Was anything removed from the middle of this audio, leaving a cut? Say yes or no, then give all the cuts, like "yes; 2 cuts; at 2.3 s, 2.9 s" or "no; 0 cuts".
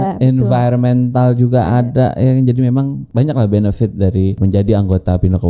yes; 2 cuts; at 3.0 s, 4.4 s